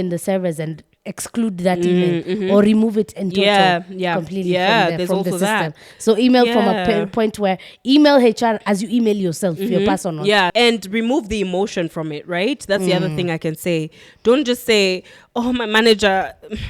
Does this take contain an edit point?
yes; 1 cut; at 10.5 s

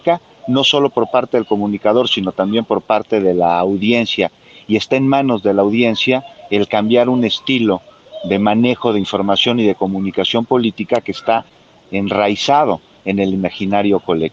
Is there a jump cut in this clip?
no; 0 cuts

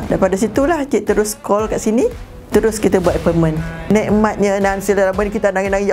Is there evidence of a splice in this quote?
yes; 2 cuts; at 2.3 s, 3.9 s

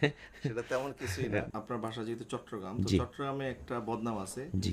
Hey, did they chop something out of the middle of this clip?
yes; 1 cut; at 1.5 s

